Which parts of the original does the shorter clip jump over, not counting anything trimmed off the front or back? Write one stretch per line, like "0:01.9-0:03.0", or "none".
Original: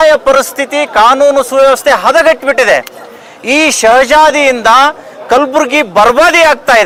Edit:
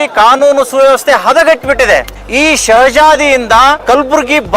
0:03.0-0:03.3
0:04.9-0:05.2